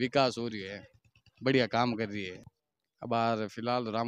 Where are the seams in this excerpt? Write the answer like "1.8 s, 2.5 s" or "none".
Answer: 2.6 s